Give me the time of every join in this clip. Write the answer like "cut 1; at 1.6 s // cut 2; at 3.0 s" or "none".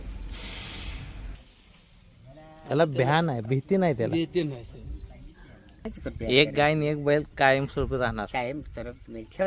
cut 1; at 1.3 s // cut 2; at 6.0 s

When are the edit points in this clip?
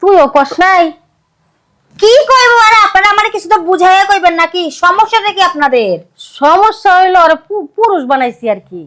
none

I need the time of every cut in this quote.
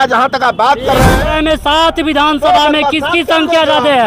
cut 1; at 1.2 s

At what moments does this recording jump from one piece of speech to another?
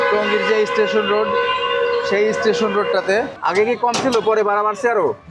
cut 1; at 3.3 s

